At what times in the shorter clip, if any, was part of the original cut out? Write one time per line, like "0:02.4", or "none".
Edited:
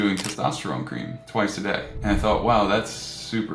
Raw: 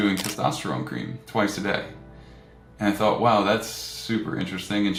0:01.9